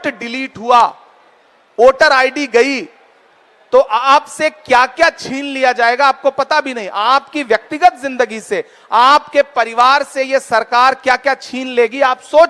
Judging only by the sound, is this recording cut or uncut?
uncut